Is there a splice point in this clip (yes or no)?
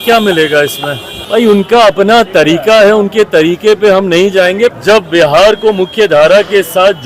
yes